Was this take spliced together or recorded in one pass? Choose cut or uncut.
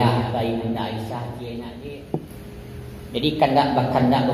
cut